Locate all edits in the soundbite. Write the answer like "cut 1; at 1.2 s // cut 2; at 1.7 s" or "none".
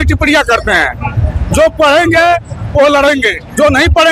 none